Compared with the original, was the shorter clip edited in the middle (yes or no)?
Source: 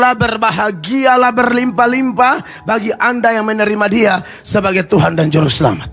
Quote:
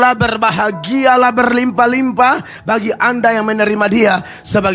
no